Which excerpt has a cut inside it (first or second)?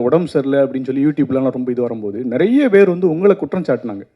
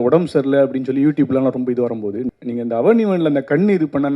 second